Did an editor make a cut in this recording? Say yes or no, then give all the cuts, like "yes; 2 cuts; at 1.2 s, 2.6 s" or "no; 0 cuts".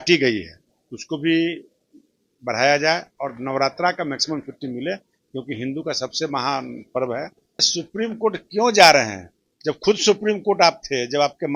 yes; 1 cut; at 7.7 s